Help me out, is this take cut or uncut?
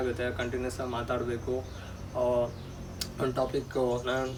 uncut